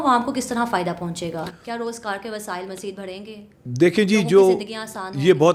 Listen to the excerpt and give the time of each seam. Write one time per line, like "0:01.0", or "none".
none

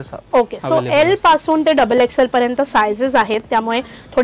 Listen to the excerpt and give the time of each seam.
none

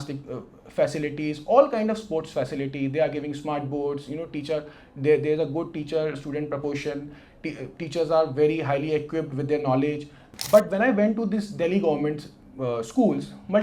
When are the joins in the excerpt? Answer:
0:10.3

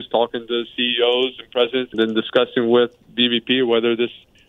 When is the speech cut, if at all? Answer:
0:01.9

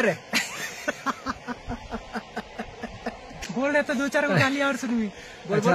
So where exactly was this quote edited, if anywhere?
0:03.6

